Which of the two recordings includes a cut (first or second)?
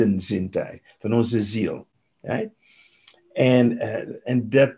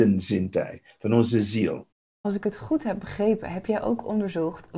second